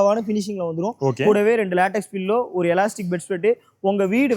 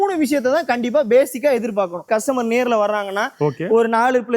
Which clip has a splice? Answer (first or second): second